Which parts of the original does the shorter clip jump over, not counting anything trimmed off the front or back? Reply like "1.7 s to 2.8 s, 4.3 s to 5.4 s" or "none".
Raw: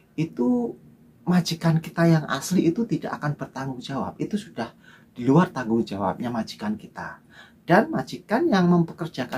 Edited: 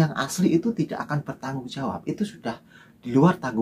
none